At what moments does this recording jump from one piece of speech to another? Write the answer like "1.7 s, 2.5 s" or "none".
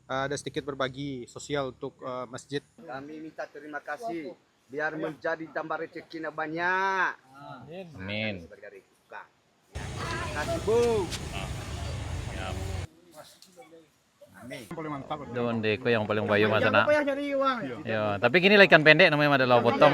2.8 s, 14.7 s